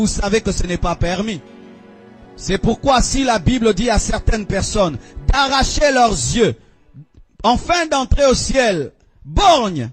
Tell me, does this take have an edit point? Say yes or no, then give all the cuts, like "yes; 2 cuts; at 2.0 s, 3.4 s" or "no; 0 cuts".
no; 0 cuts